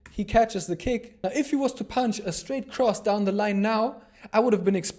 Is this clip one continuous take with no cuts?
no; 1 cut; at 1.1 s

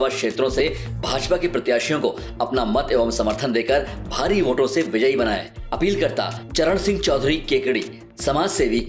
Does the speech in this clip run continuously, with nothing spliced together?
yes; 0 cuts

